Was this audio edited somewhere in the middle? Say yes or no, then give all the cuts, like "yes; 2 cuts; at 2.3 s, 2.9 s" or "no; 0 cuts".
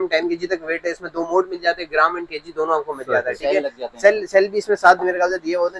no; 0 cuts